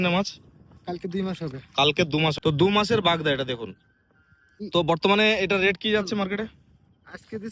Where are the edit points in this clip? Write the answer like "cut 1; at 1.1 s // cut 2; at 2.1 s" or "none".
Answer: cut 1; at 2.3 s // cut 2; at 4.5 s